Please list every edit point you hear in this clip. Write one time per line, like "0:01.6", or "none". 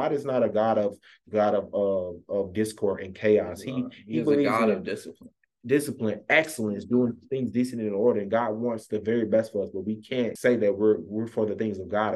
0:10.3